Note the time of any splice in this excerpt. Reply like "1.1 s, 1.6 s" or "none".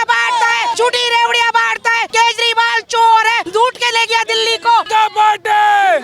0.7 s, 2.0 s, 3.4 s, 4.9 s